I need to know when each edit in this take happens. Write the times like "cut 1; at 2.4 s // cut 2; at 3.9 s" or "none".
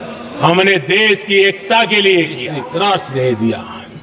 cut 1; at 2.6 s